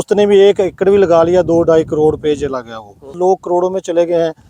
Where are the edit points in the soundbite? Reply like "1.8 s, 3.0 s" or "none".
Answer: 3.2 s